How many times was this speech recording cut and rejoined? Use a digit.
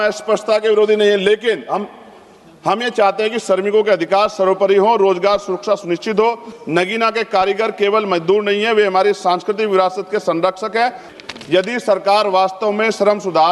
2